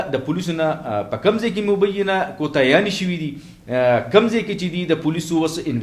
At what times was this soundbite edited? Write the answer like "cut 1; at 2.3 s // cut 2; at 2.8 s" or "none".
none